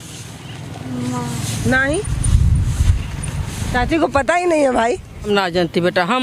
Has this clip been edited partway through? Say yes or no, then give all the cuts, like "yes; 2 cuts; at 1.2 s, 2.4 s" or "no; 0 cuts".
yes; 1 cut; at 5.3 s